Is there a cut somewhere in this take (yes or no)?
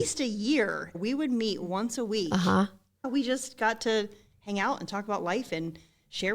yes